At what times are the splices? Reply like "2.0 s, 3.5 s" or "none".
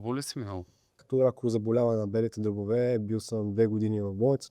1.0 s

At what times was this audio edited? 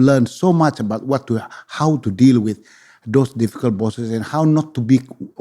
none

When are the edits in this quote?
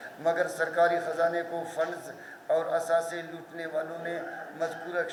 none

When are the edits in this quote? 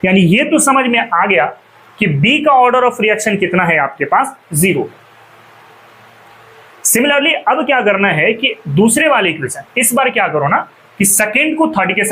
none

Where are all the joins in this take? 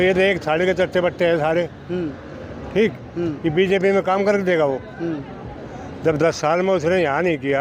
none

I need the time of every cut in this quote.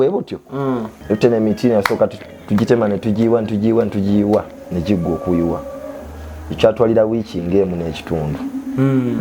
0.9 s

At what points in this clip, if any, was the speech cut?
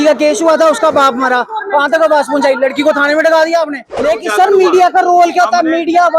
3.9 s

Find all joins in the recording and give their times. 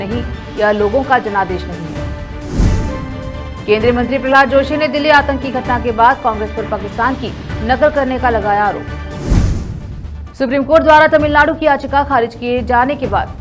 none

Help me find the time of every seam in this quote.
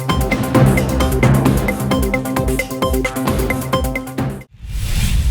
4.4 s

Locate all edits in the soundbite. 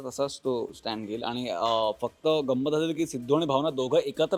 none

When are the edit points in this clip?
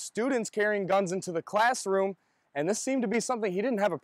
none

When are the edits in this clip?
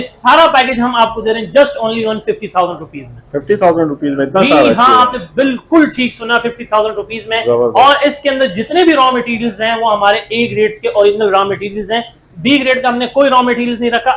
none

